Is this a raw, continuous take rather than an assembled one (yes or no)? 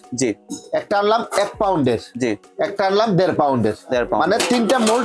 yes